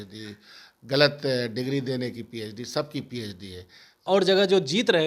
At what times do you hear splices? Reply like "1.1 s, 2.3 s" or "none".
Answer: 4.1 s